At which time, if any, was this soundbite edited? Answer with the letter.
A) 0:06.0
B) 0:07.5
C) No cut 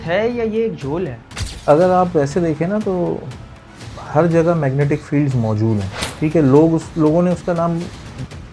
A